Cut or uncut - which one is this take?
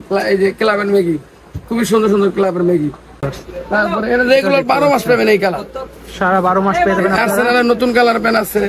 cut